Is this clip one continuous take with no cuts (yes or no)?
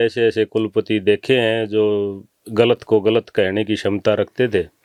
yes